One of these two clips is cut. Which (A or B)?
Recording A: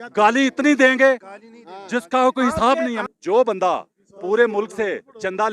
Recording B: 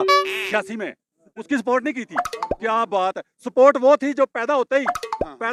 A